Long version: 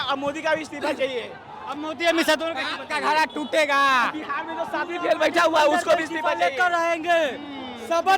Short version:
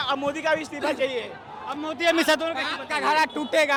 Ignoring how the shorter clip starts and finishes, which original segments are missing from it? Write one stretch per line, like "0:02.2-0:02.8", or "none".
none